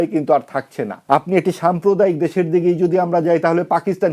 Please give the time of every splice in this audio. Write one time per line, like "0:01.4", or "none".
0:00.9